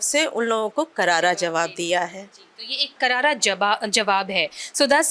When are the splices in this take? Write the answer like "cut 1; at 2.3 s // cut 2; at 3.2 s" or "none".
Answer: none